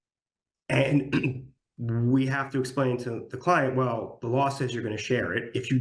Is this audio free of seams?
yes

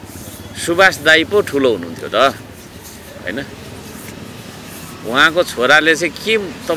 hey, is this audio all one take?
yes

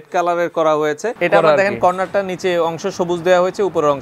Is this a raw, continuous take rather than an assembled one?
no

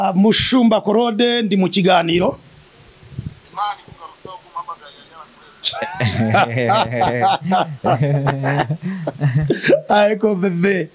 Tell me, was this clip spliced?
no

